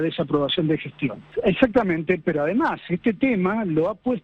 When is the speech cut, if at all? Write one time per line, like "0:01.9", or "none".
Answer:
0:01.2